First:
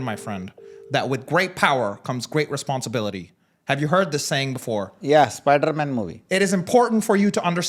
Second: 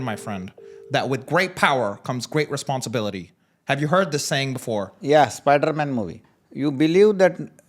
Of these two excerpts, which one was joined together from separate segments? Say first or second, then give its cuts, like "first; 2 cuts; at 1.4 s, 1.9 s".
second; 1 cut; at 6.1 s